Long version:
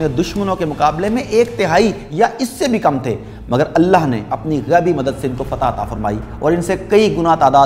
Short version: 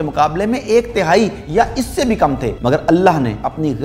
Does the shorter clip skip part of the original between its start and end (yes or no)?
yes